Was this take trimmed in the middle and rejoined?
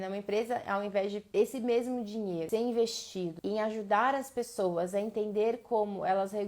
yes; 3 cuts; at 1.2 s, 2.5 s, 3.4 s

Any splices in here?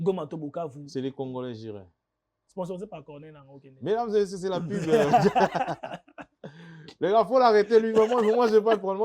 yes; 1 cut; at 2.4 s

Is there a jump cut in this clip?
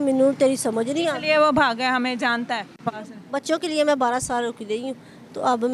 yes; 1 cut; at 3.1 s

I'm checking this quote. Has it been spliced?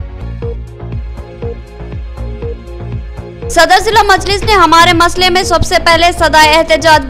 yes; 1 cut; at 1.2 s

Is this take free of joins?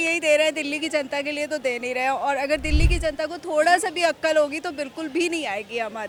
yes; 0 cuts

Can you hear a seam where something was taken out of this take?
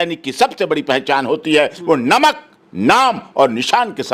no; 0 cuts

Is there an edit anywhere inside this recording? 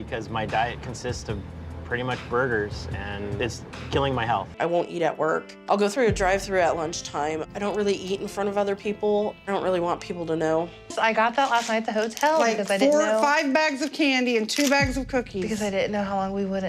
yes; 2 cuts; at 4.5 s, 10.8 s

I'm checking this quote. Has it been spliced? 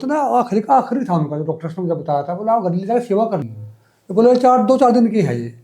yes; 1 cut; at 3.6 s

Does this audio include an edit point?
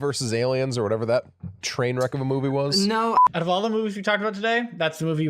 yes; 1 cut; at 3.2 s

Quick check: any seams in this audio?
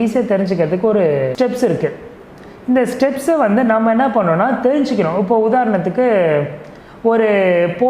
no; 0 cuts

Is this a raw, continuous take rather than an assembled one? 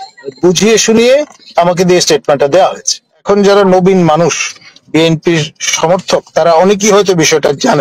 no; 1 cut; at 3.2 s

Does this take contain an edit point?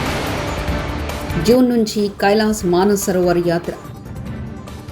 yes; 1 cut; at 1.2 s

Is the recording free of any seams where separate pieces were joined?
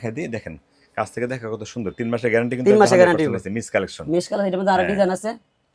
yes; 0 cuts

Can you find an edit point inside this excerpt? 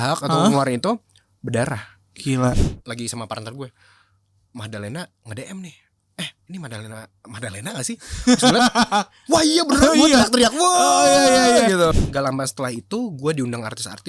yes; 2 cuts; at 2.6 s, 11.9 s

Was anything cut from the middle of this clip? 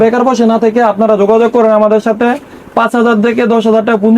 no; 0 cuts

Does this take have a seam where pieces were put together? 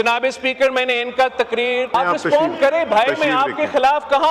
yes; 1 cut; at 1.9 s

